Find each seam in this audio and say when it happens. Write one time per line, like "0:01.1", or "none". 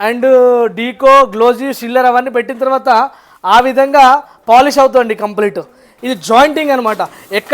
0:06.0